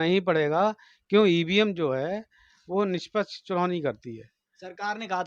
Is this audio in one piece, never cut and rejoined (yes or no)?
yes